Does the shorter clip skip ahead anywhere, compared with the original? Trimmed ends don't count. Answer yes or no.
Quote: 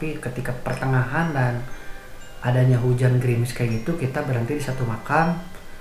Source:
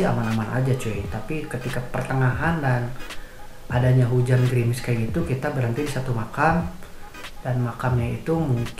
no